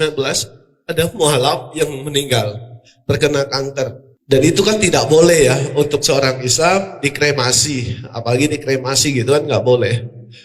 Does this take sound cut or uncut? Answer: cut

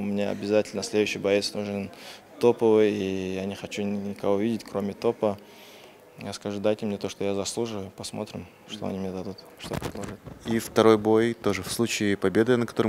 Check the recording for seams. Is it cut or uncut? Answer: uncut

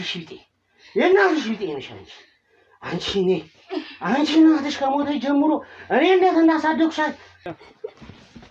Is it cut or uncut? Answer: cut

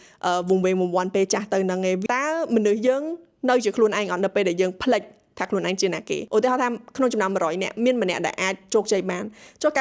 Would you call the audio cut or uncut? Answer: cut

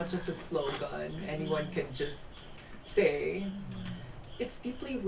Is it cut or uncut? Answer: uncut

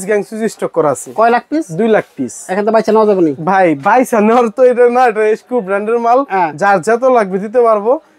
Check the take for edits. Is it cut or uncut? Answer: uncut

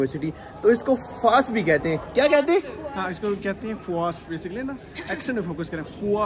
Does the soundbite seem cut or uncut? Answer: uncut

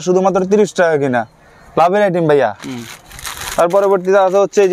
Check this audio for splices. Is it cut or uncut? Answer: uncut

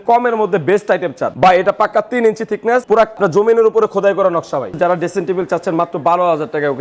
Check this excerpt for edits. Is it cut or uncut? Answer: cut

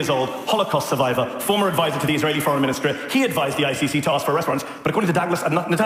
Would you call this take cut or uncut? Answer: uncut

